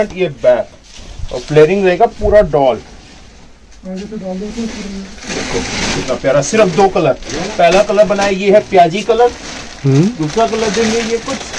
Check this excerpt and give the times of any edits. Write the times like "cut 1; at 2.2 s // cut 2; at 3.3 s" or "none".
none